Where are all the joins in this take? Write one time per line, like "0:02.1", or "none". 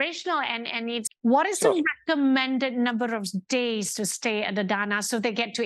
0:01.1